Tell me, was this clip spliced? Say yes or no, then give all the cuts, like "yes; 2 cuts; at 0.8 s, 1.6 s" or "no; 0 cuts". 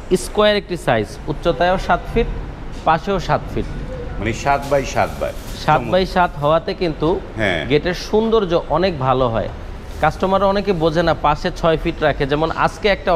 no; 0 cuts